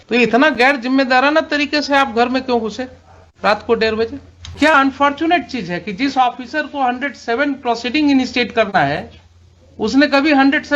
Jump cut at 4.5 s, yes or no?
yes